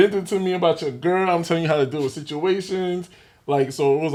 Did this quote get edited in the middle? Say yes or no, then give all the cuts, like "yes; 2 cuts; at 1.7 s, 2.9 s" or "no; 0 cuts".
no; 0 cuts